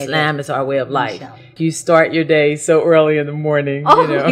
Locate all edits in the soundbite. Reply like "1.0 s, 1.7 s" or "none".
1.5 s